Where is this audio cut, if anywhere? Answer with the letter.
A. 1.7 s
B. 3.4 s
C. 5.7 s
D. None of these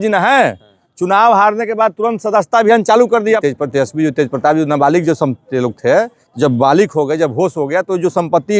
B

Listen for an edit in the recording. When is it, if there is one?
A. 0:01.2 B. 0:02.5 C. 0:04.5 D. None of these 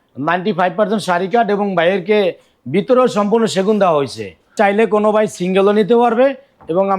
C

